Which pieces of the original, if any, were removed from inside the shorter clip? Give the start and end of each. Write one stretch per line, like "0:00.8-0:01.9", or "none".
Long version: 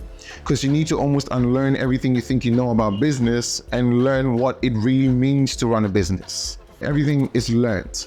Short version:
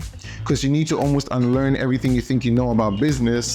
none